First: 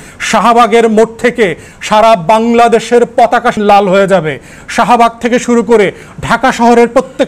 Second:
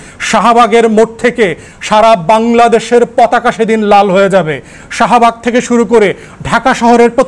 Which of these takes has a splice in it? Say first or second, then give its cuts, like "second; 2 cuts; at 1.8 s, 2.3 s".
first; 1 cut; at 3.6 s